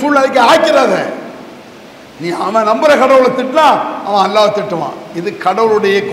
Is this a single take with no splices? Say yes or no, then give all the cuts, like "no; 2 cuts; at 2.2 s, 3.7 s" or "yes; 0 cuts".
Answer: yes; 0 cuts